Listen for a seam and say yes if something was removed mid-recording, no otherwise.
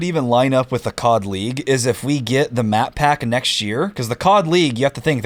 no